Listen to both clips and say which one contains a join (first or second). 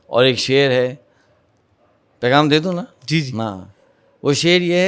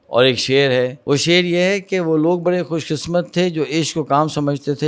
second